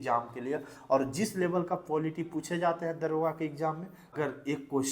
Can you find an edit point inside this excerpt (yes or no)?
yes